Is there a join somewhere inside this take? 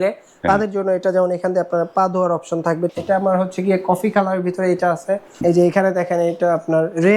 yes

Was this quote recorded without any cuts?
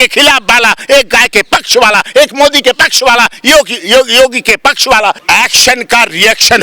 no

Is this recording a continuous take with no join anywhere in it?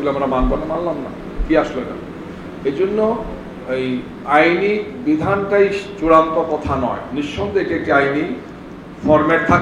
yes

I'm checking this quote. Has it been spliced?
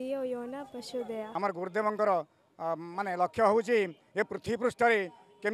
yes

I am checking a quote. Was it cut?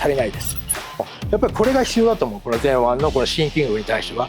yes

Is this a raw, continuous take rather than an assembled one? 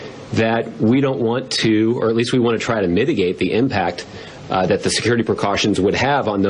yes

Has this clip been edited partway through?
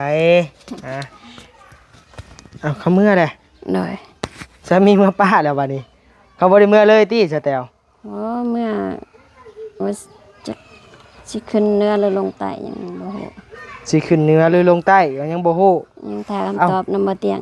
no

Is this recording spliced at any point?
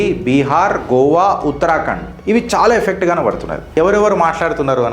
yes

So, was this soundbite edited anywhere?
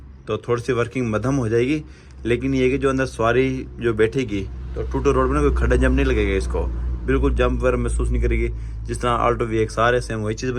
no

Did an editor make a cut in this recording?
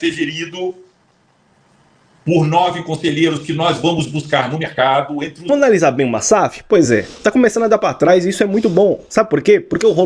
yes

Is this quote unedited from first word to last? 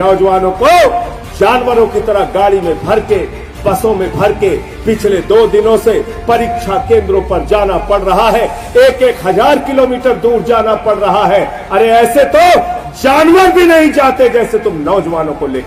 yes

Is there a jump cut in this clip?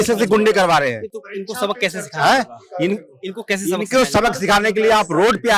no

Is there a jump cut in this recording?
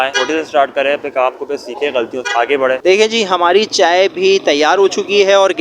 yes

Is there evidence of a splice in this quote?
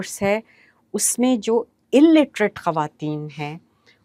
no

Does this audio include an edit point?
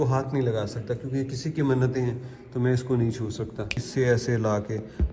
yes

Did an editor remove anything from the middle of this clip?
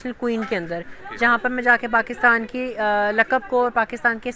no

